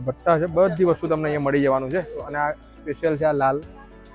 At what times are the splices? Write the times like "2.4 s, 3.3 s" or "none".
none